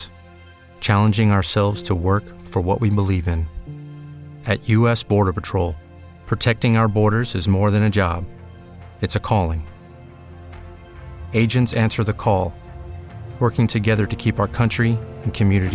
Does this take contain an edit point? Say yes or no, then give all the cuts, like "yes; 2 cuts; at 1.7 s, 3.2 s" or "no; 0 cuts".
no; 0 cuts